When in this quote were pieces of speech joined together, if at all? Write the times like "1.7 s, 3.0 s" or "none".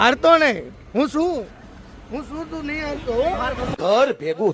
none